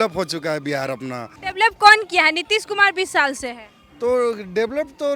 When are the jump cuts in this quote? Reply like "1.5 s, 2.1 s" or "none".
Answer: none